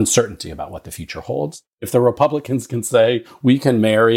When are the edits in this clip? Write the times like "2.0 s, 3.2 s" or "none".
1.7 s, 3.3 s